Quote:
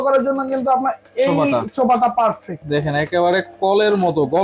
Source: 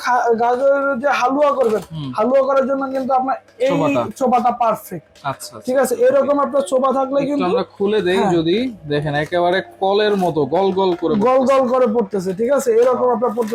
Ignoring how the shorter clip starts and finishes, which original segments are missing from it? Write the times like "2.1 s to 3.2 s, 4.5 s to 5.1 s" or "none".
5.0 s to 8.8 s